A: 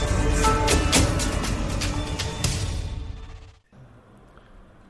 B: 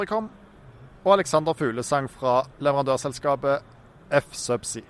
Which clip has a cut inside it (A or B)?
A